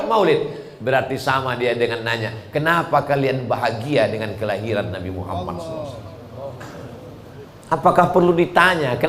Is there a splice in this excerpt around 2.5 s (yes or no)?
no